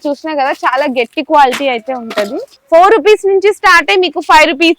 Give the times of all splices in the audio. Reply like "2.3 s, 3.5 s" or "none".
2.5 s